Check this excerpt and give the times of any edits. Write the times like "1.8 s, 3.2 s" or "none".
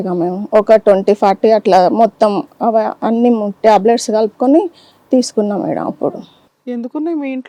none